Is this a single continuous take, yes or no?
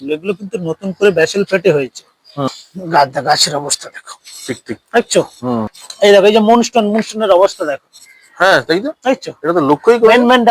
no